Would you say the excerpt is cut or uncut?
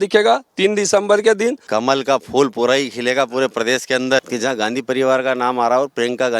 cut